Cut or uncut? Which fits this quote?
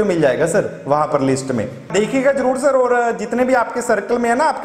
cut